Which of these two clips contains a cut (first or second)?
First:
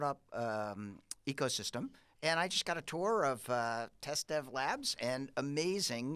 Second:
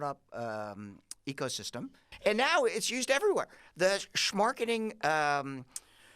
second